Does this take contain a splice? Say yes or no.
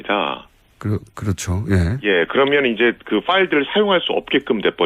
no